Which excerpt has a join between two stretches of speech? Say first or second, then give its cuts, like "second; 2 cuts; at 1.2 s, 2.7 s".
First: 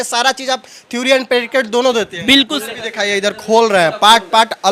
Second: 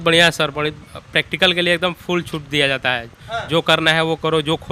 first; 1 cut; at 2.6 s